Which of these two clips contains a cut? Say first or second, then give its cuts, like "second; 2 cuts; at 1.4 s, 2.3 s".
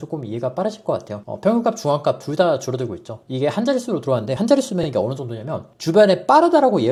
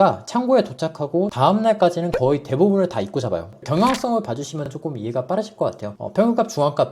second; 1 cut; at 3.6 s